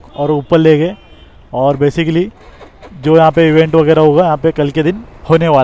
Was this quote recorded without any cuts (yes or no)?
yes